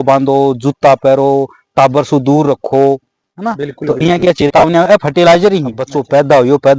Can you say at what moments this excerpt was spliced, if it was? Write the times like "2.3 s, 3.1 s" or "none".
5.8 s